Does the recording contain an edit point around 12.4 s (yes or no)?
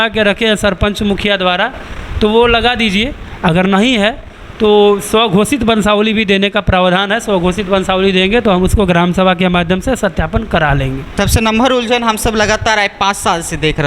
no